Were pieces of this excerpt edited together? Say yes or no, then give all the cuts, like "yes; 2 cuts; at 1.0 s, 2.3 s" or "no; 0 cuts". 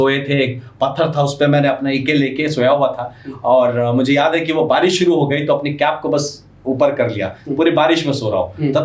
no; 0 cuts